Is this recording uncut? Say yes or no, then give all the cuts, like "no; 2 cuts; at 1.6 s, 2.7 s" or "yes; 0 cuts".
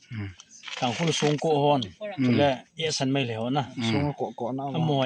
yes; 0 cuts